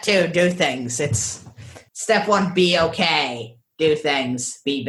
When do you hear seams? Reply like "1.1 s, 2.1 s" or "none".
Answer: none